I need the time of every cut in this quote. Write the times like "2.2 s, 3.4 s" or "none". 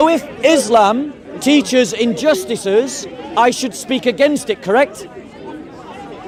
none